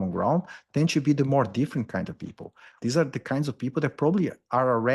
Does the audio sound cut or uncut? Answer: cut